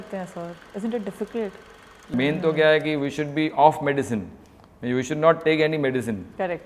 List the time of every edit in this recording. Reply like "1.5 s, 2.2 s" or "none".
2.1 s